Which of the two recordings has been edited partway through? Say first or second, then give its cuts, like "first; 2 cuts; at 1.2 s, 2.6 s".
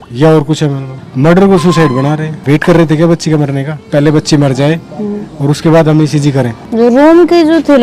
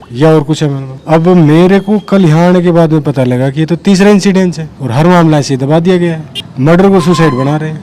first; 3 cuts; at 0.9 s, 2.3 s, 6.7 s